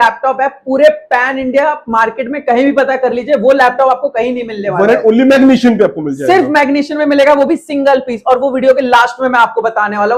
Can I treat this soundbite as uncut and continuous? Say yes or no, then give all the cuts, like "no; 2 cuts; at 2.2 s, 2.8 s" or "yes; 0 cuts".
yes; 0 cuts